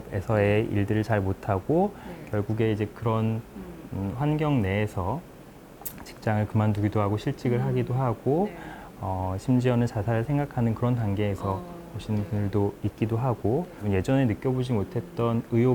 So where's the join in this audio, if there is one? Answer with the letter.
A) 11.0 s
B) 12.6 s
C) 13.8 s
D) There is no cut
C